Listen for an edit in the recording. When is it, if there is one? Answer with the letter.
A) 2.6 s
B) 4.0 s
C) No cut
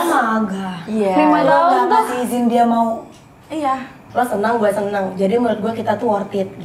B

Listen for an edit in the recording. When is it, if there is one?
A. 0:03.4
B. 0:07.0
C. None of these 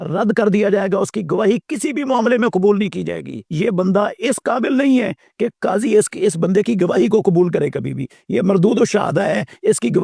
A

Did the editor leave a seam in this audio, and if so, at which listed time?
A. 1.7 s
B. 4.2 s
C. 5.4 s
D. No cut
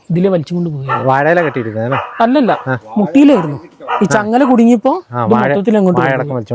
D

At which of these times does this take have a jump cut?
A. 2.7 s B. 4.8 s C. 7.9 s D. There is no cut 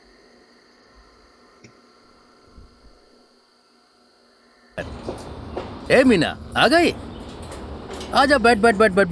B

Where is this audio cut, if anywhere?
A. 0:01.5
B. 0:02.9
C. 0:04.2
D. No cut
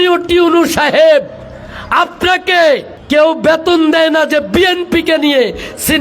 B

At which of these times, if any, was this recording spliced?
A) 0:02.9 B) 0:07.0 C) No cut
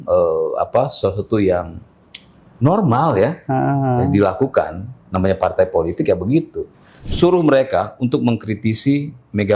B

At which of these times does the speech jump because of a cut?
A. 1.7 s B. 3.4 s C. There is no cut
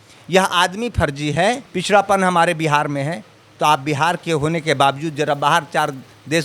A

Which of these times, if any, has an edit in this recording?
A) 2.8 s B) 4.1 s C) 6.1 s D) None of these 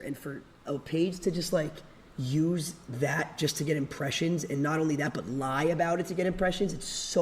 D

